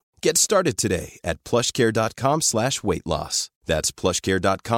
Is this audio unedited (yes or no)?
yes